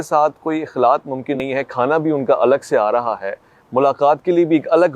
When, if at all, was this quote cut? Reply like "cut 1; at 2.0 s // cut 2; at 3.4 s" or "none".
cut 1; at 1.4 s

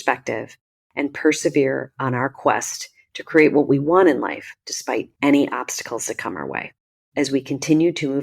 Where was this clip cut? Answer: cut 1; at 5.1 s

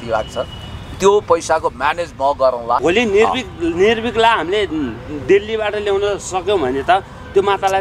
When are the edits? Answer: cut 1; at 2.8 s

